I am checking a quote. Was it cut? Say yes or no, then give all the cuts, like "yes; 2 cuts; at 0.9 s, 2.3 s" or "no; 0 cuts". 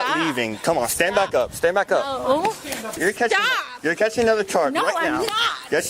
yes; 1 cut; at 3.0 s